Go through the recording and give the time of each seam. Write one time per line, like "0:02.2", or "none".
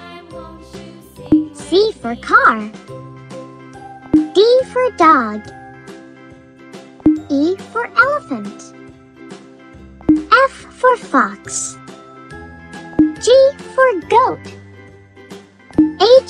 0:02.7
0:04.1
0:05.6
0:07.0
0:08.6
0:10.0